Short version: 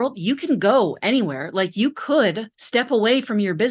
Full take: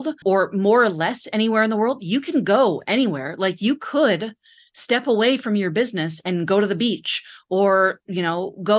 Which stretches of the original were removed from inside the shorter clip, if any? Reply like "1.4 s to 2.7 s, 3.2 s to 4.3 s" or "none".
4.4 s to 4.7 s